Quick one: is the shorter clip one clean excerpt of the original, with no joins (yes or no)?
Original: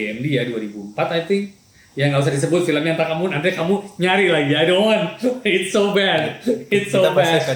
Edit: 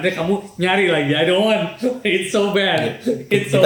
yes